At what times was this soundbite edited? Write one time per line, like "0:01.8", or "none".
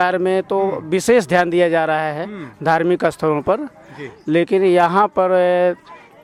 none